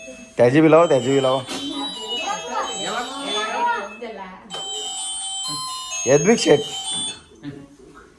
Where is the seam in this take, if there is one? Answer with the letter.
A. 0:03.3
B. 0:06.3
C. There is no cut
C